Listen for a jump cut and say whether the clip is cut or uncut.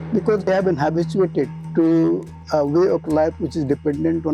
uncut